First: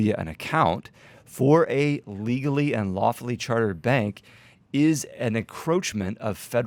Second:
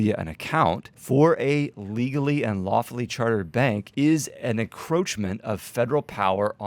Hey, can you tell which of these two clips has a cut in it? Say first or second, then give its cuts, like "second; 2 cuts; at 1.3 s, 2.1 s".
second; 2 cuts; at 0.9 s, 3.9 s